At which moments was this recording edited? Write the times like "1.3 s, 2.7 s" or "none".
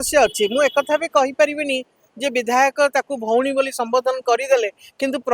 none